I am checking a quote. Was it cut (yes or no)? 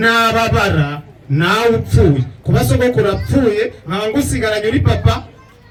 no